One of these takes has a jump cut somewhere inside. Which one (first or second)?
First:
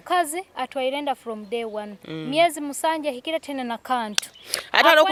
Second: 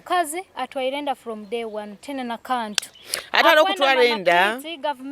second